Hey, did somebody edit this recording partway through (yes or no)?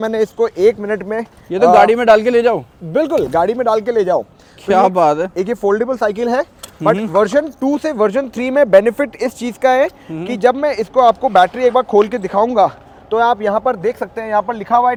no